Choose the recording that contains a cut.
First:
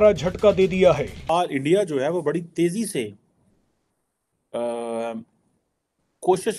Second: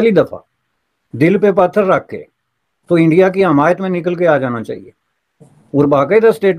first; 1 cut; at 1.2 s

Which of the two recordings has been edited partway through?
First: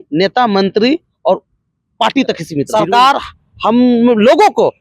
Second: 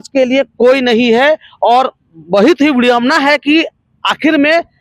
first; 1 cut; at 2.7 s

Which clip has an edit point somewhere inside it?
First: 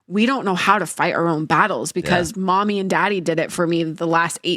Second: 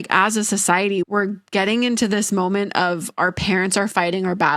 second; 1 cut; at 1.1 s

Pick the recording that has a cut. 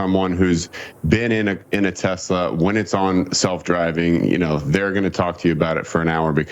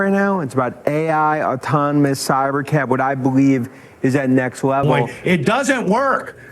second; 1 cut; at 5.1 s

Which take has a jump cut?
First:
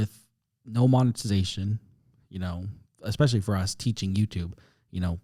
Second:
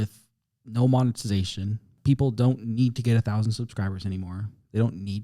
second; 1 cut; at 1.9 s

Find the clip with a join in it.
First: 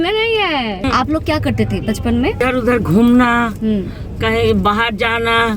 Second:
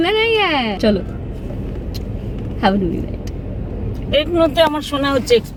first; 2 cuts; at 0.8 s, 2.4 s

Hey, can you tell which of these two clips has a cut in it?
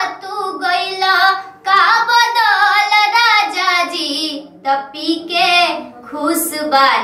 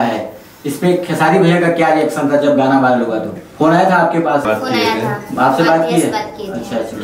second; 2 cuts; at 3.4 s, 4.4 s

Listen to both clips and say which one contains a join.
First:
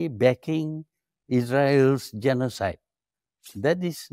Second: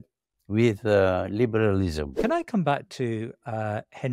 second; 1 cut; at 2.1 s

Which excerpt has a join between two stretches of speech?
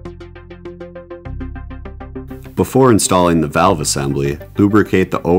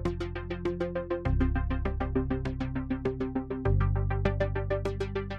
first; 1 cut; at 2.5 s

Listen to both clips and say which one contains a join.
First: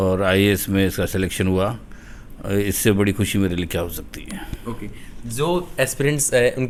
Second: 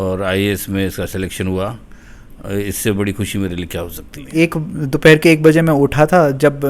second; 1 cut; at 4.3 s

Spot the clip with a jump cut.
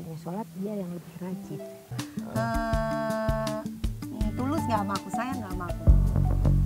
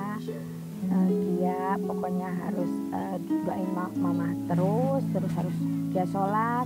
first; 1 cut; at 1.9 s

